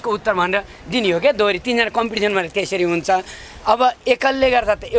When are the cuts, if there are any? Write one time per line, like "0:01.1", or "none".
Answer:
none